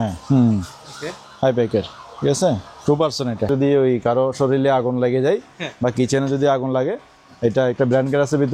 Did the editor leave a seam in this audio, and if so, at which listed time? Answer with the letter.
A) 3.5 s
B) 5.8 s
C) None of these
A